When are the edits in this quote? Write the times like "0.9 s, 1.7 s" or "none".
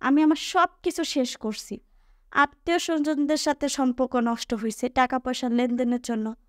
none